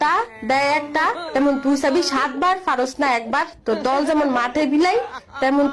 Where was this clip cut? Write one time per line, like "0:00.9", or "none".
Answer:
none